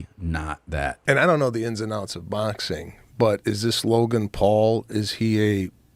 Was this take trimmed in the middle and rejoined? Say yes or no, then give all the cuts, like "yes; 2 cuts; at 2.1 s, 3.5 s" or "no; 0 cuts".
yes; 1 cut; at 0.9 s